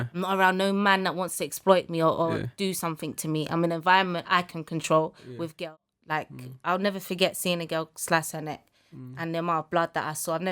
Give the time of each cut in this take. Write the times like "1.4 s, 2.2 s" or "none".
5.7 s